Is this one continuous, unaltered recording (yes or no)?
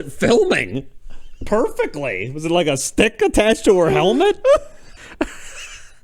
no